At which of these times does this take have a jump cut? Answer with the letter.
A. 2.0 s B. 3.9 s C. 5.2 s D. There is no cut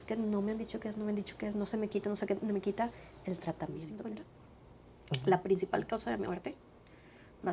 B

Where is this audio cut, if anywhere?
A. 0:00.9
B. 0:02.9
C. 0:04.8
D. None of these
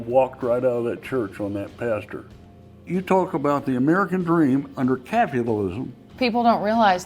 B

